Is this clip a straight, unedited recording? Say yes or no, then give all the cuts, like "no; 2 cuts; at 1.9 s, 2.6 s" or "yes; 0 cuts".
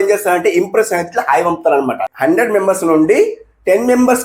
no; 1 cut; at 2.1 s